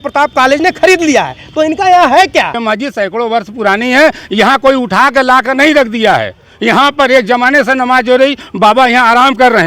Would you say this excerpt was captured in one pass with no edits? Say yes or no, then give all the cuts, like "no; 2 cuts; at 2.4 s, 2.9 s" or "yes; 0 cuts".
no; 1 cut; at 2.6 s